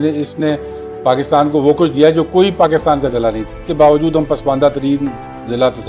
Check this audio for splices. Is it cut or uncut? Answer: cut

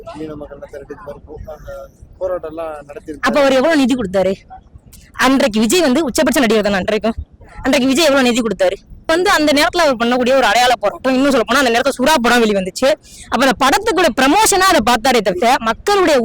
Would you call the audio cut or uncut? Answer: cut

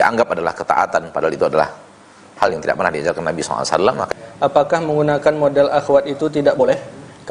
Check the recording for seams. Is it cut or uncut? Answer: cut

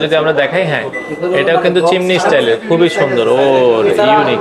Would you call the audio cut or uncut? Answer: uncut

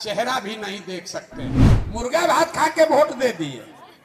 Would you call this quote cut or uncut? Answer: cut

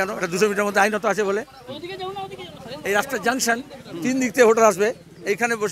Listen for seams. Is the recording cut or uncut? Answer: uncut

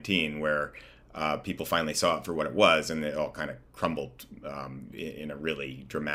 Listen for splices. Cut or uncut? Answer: uncut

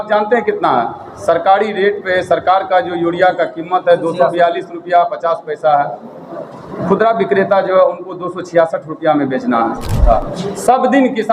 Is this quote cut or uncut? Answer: cut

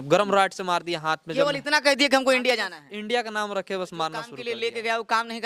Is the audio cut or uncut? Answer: cut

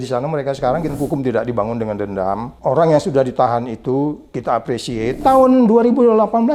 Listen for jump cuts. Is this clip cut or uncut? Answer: cut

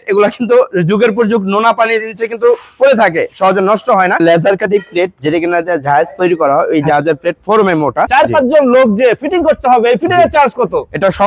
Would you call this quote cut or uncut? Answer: cut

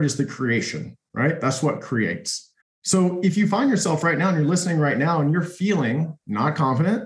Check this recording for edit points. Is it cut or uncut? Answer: uncut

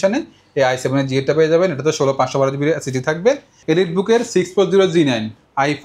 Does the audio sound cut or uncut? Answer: cut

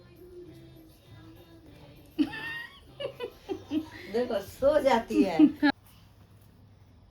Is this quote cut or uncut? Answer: cut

